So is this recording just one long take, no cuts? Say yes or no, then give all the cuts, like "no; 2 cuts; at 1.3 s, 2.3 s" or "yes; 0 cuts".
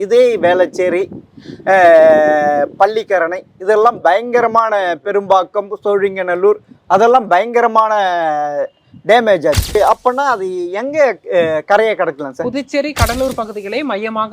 no; 1 cut; at 9.8 s